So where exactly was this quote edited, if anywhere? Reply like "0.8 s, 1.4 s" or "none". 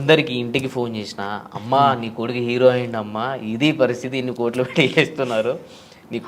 none